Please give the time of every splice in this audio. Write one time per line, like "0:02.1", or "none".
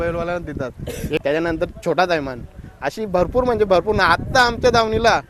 0:01.2